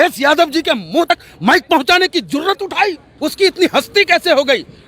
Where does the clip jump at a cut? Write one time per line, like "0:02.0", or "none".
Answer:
0:01.1
0:03.1